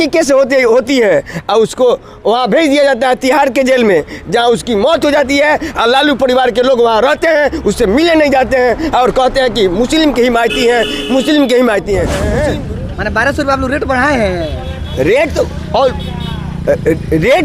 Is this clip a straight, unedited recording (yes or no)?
no